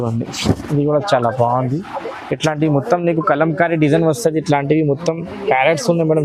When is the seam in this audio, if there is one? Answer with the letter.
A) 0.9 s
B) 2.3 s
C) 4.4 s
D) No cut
D